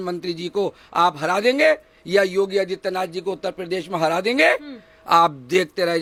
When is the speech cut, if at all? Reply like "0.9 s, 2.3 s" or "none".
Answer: none